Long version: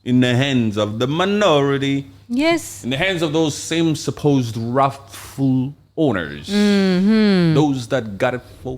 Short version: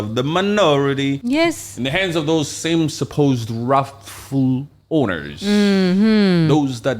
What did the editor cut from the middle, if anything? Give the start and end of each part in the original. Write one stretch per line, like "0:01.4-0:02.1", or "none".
0:02.0-0:02.3

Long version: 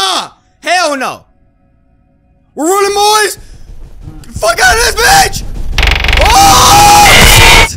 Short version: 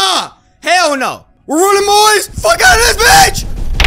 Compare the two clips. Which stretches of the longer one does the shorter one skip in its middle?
0:01.3-0:02.4
0:03.4-0:04.3

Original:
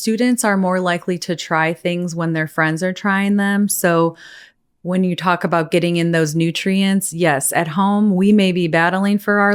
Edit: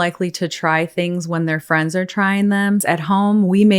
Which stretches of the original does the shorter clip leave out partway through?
0:03.7-0:07.5

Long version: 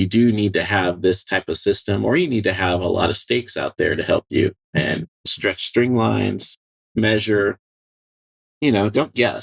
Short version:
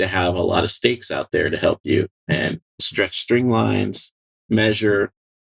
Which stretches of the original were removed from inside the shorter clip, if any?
none

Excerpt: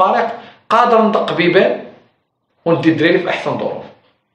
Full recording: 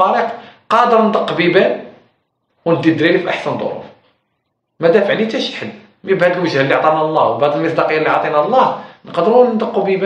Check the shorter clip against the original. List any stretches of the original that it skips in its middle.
none

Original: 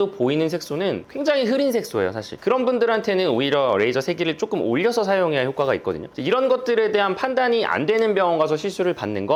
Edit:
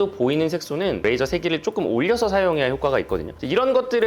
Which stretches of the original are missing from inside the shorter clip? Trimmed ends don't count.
0:01.0-0:03.8

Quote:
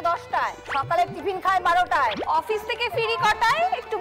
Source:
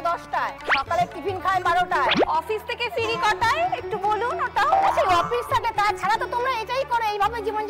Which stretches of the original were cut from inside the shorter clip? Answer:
none

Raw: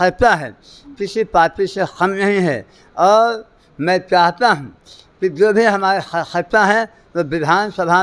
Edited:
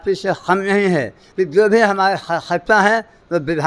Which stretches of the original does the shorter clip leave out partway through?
0:02.7-0:05.0

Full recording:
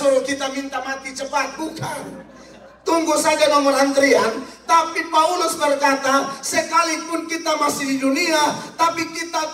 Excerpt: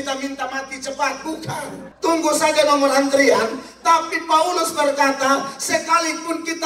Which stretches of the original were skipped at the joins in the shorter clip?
0:02.2-0:02.7

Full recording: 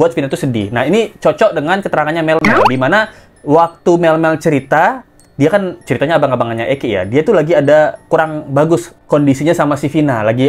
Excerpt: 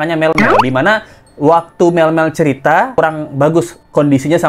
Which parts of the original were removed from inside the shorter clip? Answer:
0:05.0-0:08.1

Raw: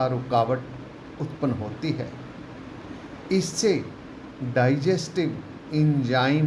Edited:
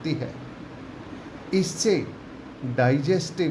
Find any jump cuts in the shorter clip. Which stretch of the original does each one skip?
none

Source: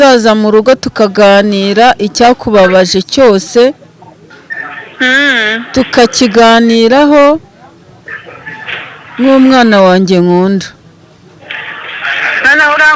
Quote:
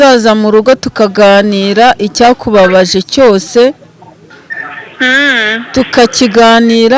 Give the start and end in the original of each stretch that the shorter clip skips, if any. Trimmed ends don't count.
none

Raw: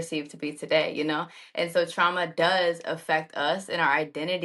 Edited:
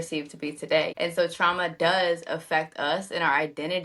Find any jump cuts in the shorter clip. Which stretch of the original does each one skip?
0:00.9-0:01.5

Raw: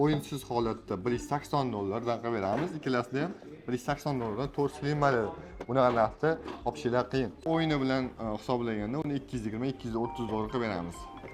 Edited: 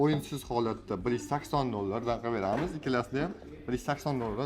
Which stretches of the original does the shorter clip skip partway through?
none

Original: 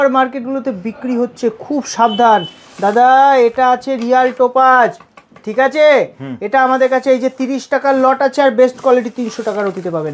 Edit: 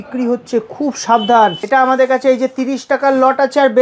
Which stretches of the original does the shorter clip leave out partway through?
0:02.5-0:06.4

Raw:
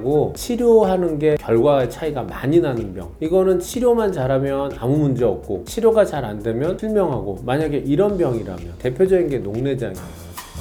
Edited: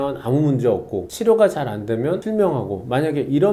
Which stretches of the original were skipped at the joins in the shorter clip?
none

